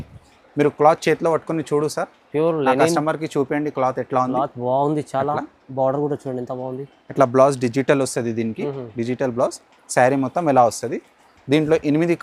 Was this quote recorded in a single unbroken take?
yes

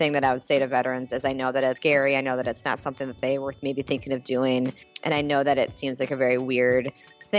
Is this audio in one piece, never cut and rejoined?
no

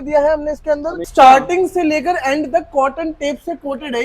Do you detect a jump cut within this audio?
yes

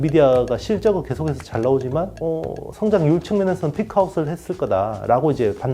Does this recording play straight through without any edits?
no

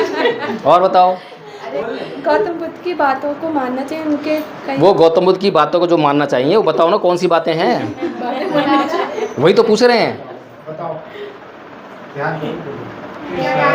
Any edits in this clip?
yes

